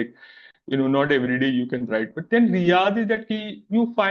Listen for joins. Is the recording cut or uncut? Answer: uncut